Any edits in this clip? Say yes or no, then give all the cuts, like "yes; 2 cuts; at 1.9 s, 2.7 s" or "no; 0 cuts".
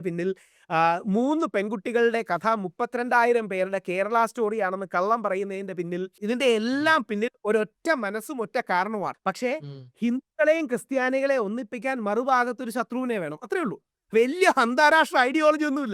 yes; 2 cuts; at 6.2 s, 9.2 s